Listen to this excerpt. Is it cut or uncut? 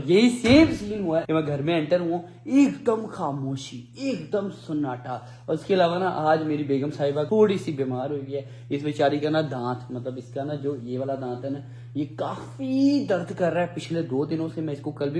uncut